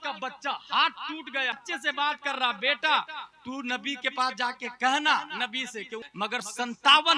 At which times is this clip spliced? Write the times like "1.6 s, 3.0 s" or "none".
1.6 s, 6.0 s